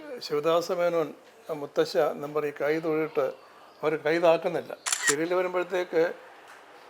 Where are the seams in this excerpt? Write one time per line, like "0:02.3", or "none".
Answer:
0:04.9